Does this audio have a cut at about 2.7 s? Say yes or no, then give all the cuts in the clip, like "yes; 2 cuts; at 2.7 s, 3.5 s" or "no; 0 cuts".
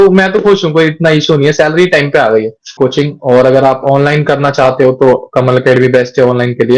yes; 1 cut; at 2.7 s